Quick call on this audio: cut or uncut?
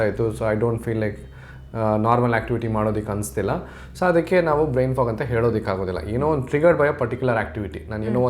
uncut